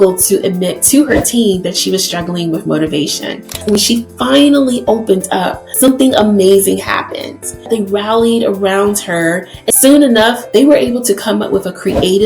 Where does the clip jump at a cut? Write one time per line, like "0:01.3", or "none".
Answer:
0:03.6
0:05.9
0:07.8
0:09.5
0:10.6